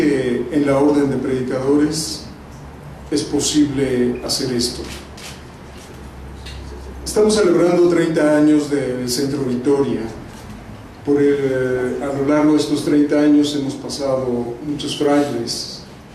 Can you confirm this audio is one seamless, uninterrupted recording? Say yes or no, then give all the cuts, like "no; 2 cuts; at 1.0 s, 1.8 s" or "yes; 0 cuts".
yes; 0 cuts